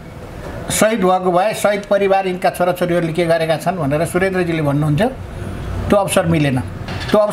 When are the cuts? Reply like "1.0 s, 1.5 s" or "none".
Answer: none